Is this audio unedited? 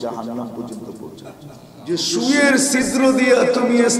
no; 1 cut; at 2.0 s

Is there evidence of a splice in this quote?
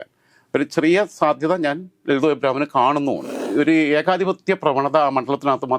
yes; 1 cut; at 3.4 s

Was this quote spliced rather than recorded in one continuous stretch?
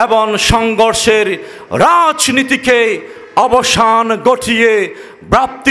no; 0 cuts

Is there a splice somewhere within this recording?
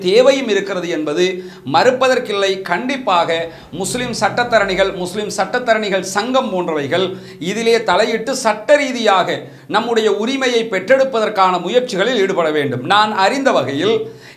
no; 0 cuts

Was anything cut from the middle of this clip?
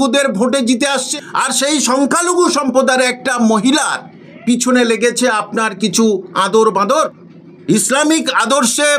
yes; 2 cuts; at 1.0 s, 6.9 s

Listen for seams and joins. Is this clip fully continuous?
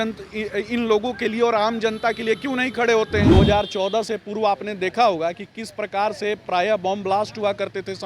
no; 1 cut; at 3.3 s

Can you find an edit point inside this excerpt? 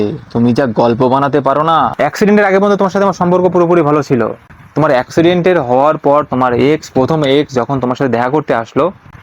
yes; 1 cut; at 1.9 s

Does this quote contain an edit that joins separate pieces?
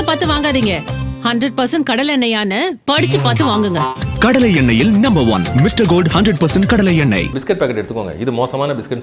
yes; 1 cut; at 7.4 s

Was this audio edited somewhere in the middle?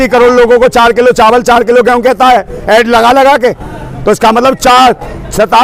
no; 0 cuts

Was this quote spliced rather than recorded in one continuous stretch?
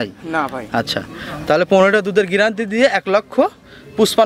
no; 0 cuts

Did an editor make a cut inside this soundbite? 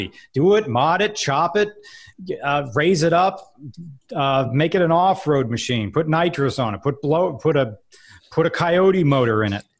no; 0 cuts

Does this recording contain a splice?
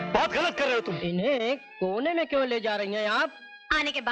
yes; 1 cut; at 1.0 s

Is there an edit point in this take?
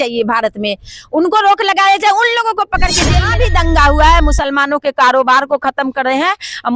yes; 1 cut; at 3.3 s

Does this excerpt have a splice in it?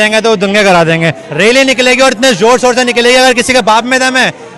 yes; 1 cut; at 1.2 s

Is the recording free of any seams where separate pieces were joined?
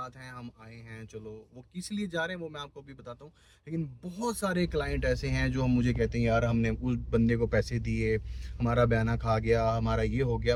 yes; 0 cuts

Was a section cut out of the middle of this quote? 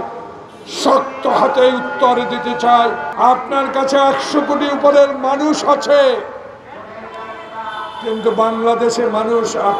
yes; 1 cut; at 3.1 s

